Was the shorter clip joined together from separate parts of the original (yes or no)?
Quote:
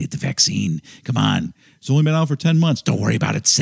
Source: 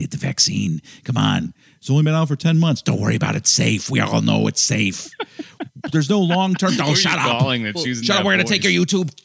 no